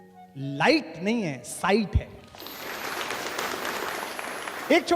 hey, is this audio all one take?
yes; 0 cuts

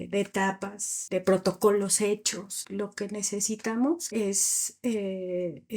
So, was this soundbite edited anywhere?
yes; 3 cuts; at 0.9 s, 2.6 s, 4.0 s

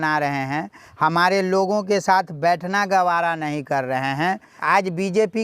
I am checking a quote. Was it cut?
yes; 1 cut; at 4.5 s

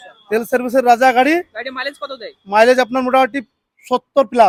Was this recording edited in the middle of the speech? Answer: no; 0 cuts

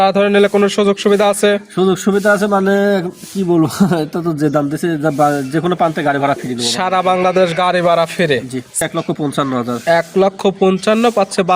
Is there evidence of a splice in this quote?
yes; 1 cut; at 8.8 s

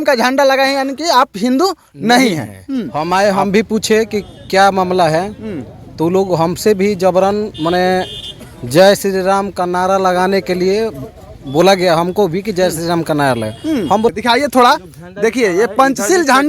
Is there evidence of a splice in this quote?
yes; 2 cuts; at 2.9 s, 14.1 s

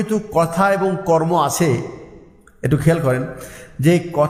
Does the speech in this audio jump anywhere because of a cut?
no; 0 cuts

